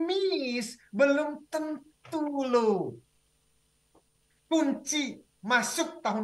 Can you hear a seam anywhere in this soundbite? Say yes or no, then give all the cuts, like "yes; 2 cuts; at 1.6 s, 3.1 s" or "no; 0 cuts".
no; 0 cuts